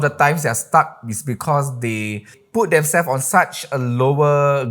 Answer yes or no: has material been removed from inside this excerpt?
yes